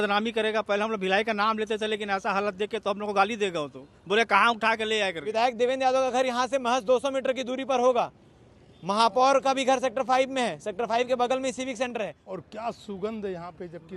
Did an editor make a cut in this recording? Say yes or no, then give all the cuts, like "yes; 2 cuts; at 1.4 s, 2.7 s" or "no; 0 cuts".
yes; 2 cuts; at 5.2 s, 12.3 s